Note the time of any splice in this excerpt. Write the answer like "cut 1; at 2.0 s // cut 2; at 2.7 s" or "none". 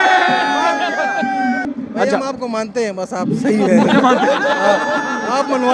cut 1; at 1.7 s